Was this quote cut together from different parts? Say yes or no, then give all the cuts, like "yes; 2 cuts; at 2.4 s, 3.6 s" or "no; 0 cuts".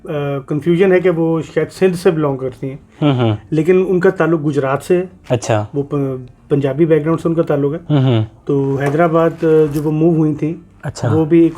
no; 0 cuts